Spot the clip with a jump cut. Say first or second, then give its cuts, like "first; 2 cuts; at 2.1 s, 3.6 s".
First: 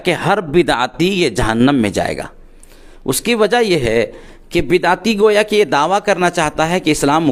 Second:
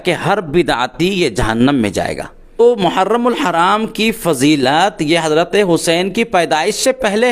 second; 1 cut; at 2.6 s